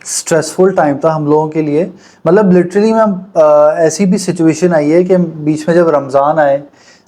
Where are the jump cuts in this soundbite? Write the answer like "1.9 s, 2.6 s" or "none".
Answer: none